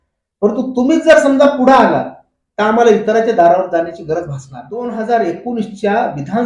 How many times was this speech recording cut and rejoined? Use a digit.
1